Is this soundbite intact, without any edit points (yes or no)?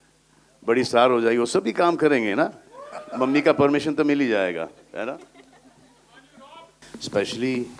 no